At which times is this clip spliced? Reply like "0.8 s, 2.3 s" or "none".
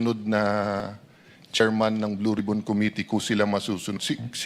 1.4 s